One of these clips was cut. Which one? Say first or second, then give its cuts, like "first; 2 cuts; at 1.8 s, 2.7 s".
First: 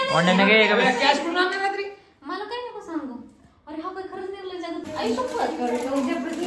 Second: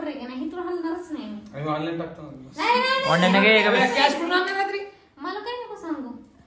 first; 1 cut; at 4.8 s